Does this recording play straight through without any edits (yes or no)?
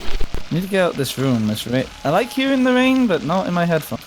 no